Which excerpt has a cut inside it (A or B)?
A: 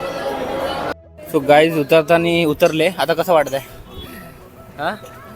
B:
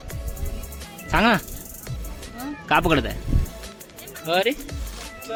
A